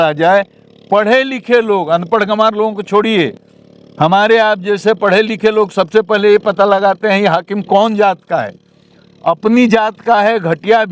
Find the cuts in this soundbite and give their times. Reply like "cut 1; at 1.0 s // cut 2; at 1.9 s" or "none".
none